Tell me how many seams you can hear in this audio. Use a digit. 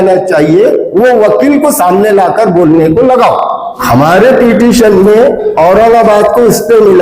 1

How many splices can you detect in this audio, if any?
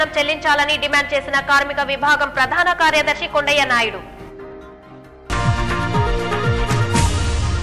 0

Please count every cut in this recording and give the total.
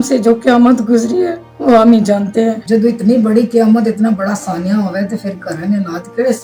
2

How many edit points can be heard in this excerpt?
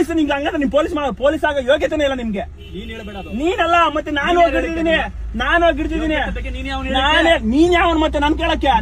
0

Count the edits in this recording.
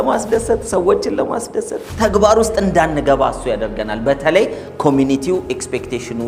0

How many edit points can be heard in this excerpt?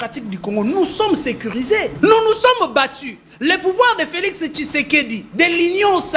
1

